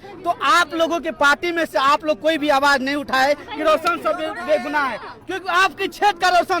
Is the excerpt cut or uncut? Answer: uncut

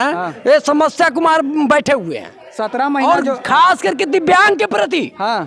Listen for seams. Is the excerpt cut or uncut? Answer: uncut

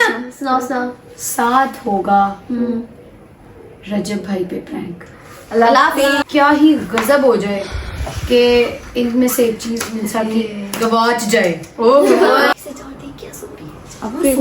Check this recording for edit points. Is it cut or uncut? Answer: cut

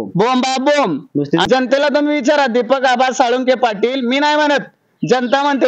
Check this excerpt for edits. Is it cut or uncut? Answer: cut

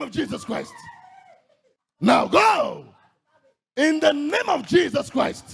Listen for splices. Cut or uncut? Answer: uncut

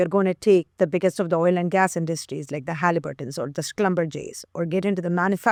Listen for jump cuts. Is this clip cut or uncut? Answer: uncut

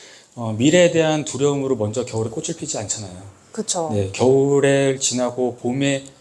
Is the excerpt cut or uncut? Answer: uncut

